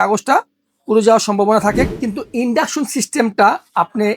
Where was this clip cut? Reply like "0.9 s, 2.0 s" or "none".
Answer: 1.9 s